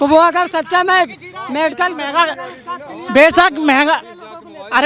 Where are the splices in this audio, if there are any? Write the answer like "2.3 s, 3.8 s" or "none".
none